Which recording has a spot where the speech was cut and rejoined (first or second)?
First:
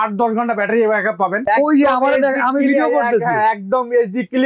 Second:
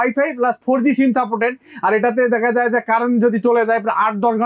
first